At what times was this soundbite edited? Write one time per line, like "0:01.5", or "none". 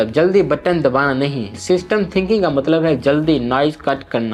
none